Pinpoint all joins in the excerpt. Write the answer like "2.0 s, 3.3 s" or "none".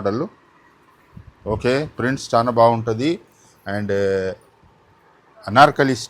none